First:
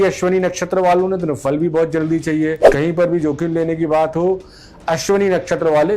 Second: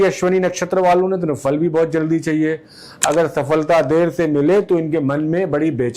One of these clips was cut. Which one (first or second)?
first